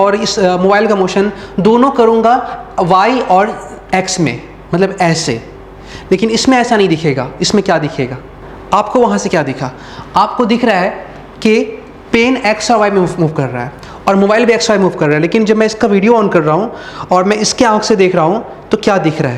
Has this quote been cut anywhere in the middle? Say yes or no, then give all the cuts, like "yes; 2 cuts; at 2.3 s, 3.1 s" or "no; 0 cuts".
yes; 1 cut; at 8.2 s